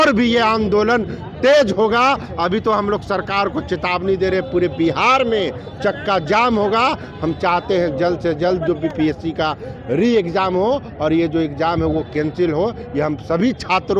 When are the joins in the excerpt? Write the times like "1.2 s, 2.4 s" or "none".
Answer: none